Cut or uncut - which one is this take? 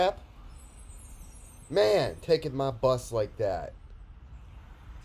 cut